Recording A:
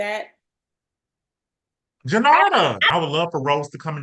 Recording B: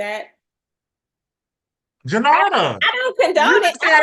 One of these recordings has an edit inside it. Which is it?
A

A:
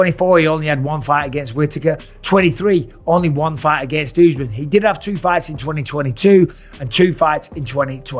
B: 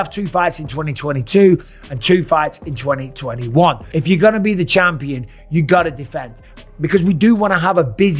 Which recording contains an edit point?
B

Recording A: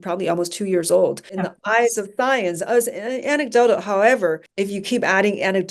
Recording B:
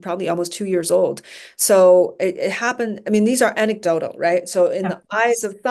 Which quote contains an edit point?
A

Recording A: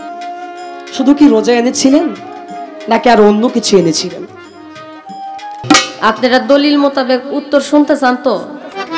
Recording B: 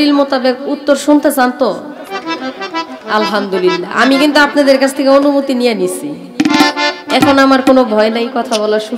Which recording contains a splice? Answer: A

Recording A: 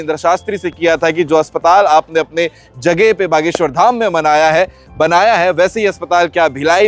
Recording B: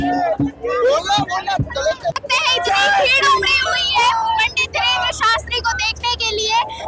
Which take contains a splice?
B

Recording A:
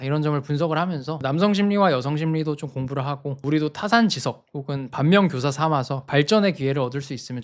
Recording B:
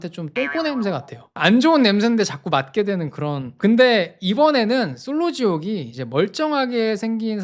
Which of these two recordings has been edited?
A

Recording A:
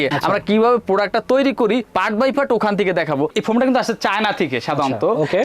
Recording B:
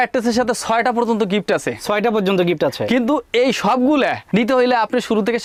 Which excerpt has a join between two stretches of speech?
A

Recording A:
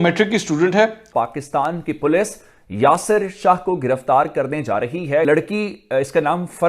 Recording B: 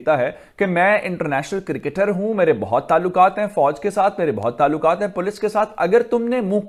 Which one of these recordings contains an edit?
A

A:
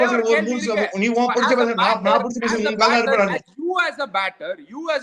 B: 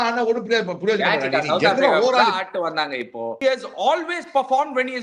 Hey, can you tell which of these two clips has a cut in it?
B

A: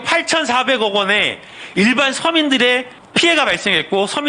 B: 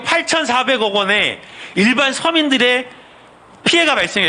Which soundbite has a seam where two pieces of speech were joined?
A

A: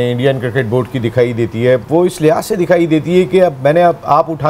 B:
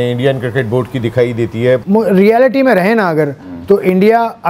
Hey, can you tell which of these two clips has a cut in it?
B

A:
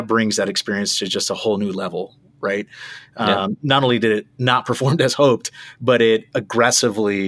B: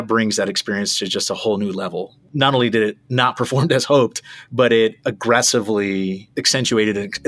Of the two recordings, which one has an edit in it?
B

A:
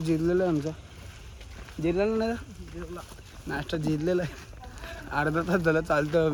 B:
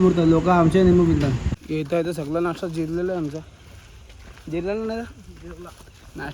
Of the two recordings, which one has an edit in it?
B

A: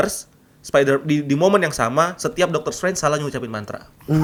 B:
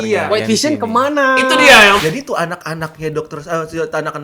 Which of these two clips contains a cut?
B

